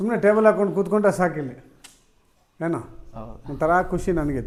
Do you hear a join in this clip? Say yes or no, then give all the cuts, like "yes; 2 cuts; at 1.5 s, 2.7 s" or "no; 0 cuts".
no; 0 cuts